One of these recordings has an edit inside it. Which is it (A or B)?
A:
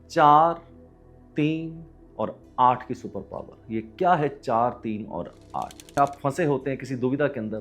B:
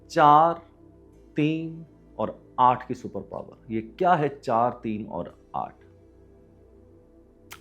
A